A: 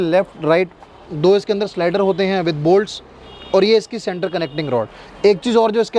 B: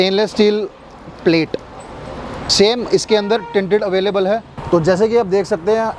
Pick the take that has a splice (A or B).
B